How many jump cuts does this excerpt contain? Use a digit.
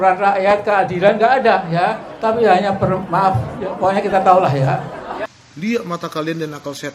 1